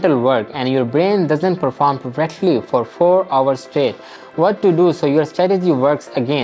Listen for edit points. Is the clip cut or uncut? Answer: uncut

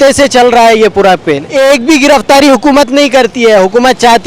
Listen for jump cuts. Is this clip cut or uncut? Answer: cut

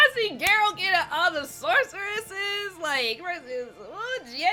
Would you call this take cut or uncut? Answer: uncut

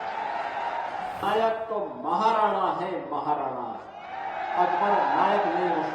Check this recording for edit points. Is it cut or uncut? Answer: cut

